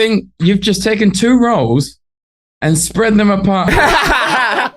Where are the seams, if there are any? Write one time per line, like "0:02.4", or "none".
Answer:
0:03.7